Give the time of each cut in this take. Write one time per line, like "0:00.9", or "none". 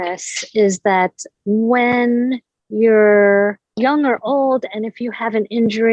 0:01.3

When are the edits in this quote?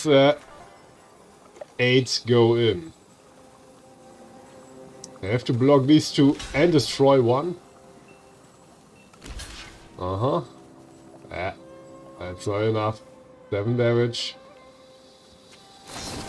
0:15.0

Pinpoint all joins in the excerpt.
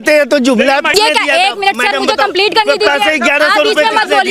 0:00.9

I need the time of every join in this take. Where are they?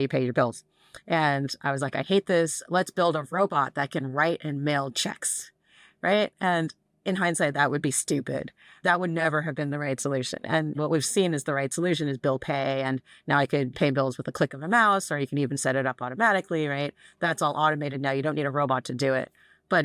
0:08.6
0:10.7
0:13.7

